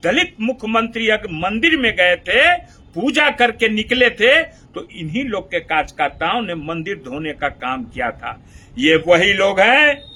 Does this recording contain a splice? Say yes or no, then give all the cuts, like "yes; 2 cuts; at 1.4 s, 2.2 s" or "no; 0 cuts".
no; 0 cuts